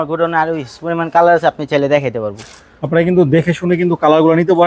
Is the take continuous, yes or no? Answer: yes